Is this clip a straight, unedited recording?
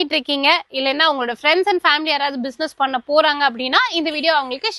yes; 0 cuts

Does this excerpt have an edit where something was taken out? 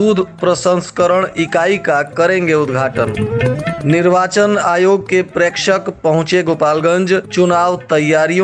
no; 0 cuts

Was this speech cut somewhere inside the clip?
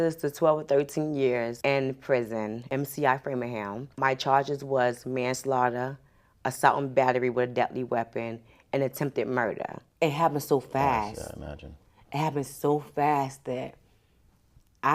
yes; 4 cuts; at 1.5 s, 2.7 s, 3.8 s, 9.8 s

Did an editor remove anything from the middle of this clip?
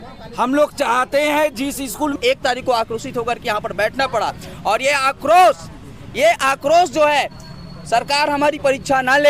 yes; 1 cut; at 2.2 s

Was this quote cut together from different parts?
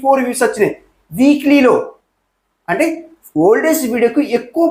no; 0 cuts

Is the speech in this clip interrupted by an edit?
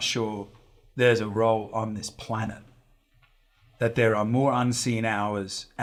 no; 0 cuts

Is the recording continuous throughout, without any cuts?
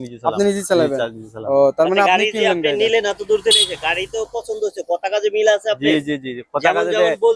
yes; 0 cuts

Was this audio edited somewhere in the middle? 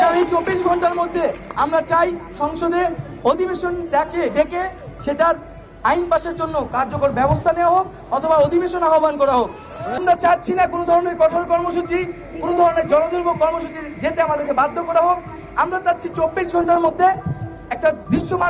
yes; 1 cut; at 10.0 s

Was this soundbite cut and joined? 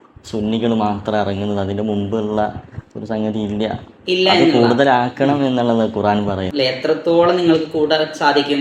yes; 1 cut; at 6.4 s

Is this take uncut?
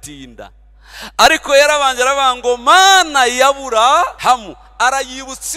no; 1 cut; at 4.1 s

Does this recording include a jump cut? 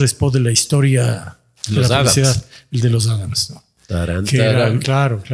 no; 0 cuts

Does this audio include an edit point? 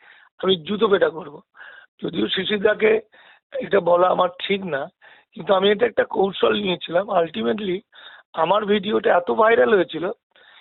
no; 0 cuts

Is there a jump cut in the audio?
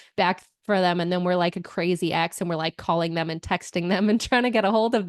no; 0 cuts

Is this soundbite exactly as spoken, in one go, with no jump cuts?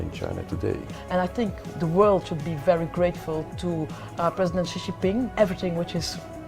no; 2 cuts; at 0.9 s, 5.3 s

